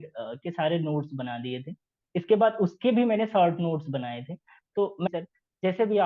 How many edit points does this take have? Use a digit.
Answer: 1